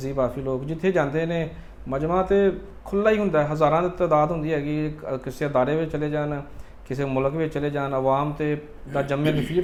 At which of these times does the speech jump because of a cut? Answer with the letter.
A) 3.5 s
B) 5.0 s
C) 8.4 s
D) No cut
D